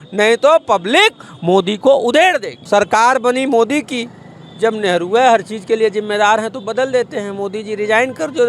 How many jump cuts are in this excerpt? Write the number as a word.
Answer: one